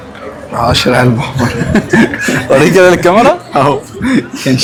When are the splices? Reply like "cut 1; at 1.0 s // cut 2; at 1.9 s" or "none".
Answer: none